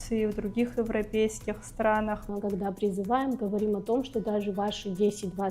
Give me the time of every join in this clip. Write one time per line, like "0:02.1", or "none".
0:02.2